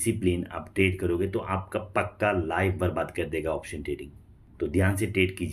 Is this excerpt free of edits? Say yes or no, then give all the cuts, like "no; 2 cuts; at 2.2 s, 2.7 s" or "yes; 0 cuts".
yes; 0 cuts